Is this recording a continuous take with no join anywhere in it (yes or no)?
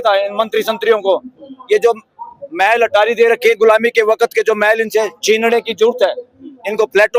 yes